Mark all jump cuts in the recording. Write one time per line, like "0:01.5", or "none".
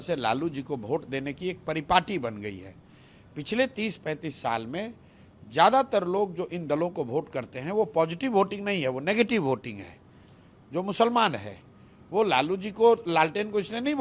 none